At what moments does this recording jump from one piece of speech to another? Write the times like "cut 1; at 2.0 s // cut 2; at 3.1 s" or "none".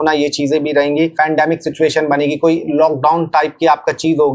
cut 1; at 1.1 s